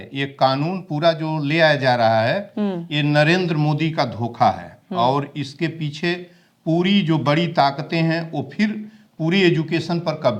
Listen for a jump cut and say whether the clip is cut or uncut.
uncut